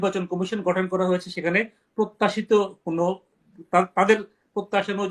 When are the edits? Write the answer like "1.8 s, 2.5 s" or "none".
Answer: none